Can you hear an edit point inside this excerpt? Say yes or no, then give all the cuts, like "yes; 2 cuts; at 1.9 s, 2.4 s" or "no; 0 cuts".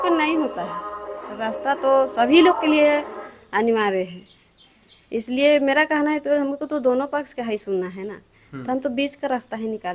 no; 0 cuts